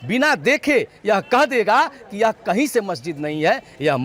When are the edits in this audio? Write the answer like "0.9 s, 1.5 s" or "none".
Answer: none

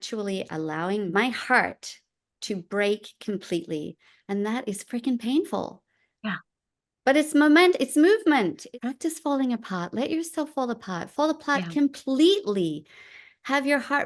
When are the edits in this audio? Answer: 1.1 s, 8.6 s

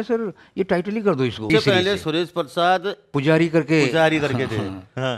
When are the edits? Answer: 1.4 s, 3.1 s

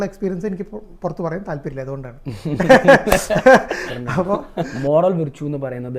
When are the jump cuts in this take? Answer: 4.7 s

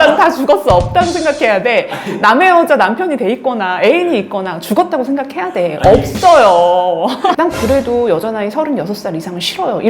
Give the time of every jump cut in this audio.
7.4 s

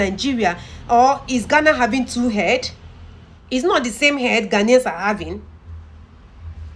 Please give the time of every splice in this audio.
3.3 s

